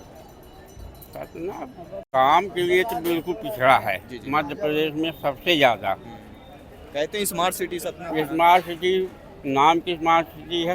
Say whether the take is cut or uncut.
cut